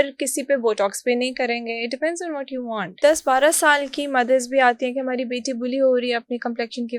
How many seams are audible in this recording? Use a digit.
1